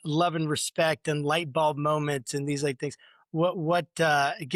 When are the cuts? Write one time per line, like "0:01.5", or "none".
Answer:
none